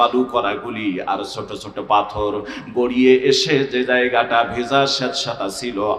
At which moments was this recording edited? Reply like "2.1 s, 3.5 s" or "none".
none